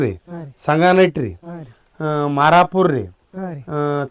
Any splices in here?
no; 0 cuts

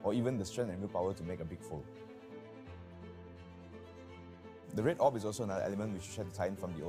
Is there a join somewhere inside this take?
no; 0 cuts

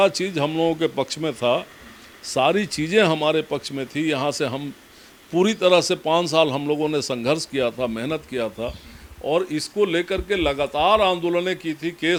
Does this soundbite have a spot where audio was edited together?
no; 0 cuts

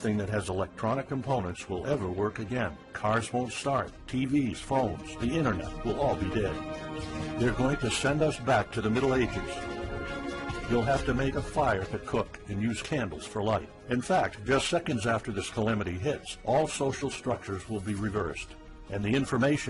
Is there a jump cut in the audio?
no; 0 cuts

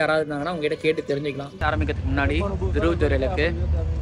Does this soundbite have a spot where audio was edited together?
yes; 1 cut; at 1.5 s

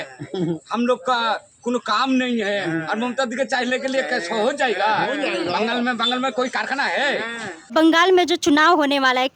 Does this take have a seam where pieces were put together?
yes; 1 cut; at 7.7 s

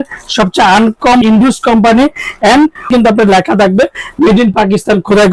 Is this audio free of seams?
no; 2 cuts; at 1.2 s, 2.9 s

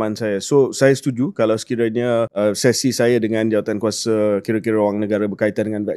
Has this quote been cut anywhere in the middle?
no; 0 cuts

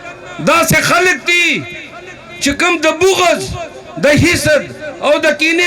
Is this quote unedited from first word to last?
yes; 0 cuts

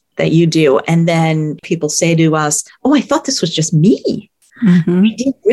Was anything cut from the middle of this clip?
yes; 2 cuts; at 1.6 s, 2.7 s

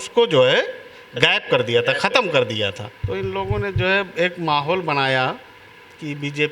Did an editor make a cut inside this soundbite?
yes; 1 cut; at 2.9 s

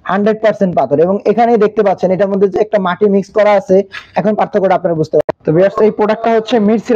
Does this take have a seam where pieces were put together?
yes; 1 cut; at 5.2 s

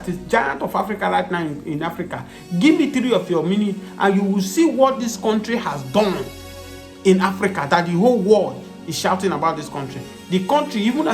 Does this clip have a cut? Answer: no; 0 cuts

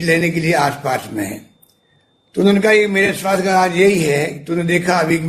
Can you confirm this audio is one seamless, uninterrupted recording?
yes; 0 cuts

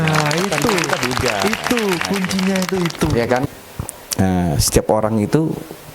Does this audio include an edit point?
yes; 1 cut; at 3.5 s

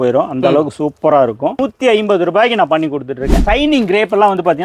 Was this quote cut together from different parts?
yes; 2 cuts; at 1.7 s, 3.4 s

